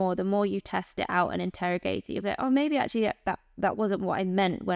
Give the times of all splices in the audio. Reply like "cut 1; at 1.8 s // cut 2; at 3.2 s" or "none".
none